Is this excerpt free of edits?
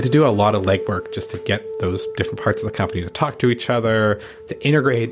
yes; 0 cuts

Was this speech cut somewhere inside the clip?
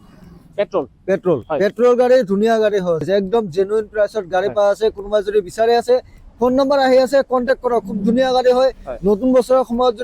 yes; 1 cut; at 3.0 s

